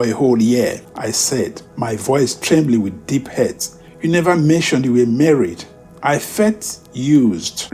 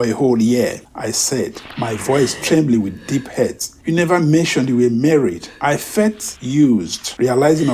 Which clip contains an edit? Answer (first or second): second